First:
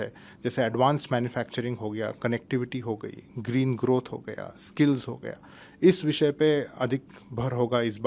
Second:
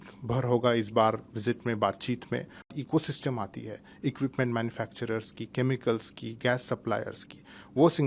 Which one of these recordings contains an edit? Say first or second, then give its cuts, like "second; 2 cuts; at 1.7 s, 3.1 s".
second; 1 cut; at 2.7 s